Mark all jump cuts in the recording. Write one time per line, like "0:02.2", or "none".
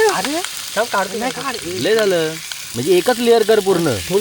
none

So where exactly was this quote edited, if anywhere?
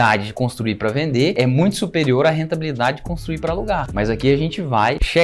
0:01.3

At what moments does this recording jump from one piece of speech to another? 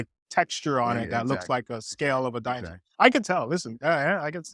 none

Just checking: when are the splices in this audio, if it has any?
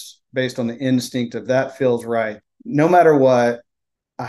0:02.4

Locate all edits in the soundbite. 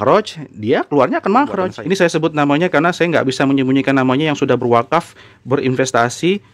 0:01.8

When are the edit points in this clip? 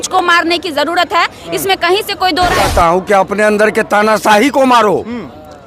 0:02.6

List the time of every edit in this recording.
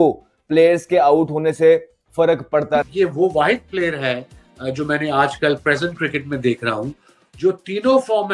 0:02.9

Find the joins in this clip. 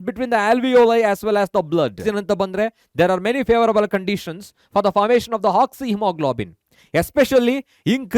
0:02.0

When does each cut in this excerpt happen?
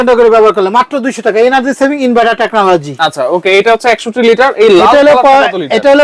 none

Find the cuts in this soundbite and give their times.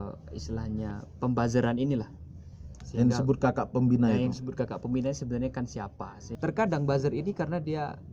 0:06.2

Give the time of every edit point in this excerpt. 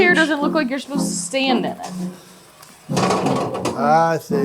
none

